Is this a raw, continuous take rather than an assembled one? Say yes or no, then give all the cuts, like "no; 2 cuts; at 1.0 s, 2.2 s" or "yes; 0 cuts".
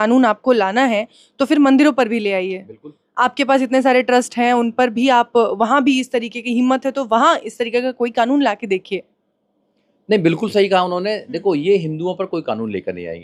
yes; 0 cuts